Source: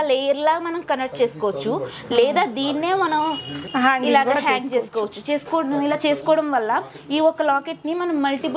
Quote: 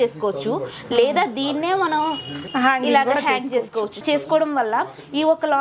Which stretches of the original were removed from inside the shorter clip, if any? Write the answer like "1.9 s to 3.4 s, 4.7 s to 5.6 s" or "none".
5.2 s to 6.0 s